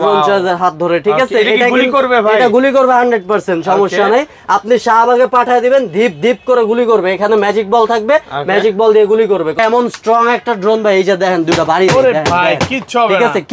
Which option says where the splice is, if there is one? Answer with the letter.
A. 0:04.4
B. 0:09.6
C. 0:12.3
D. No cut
B